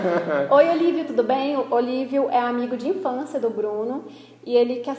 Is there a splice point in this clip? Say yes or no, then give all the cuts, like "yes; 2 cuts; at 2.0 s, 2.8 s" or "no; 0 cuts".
no; 0 cuts